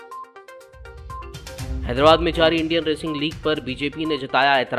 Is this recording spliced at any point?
no; 0 cuts

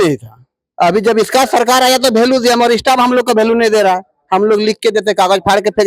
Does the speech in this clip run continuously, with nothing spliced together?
yes; 0 cuts

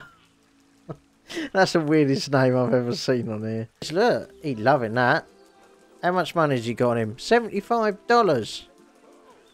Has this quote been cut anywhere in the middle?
yes; 1 cut; at 3.9 s

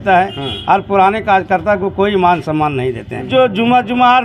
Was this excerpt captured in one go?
no; 1 cut; at 3.3 s

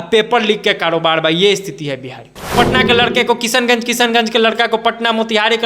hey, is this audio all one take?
no; 1 cut; at 2.4 s

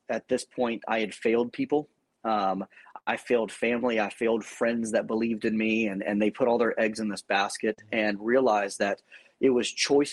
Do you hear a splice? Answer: no; 0 cuts

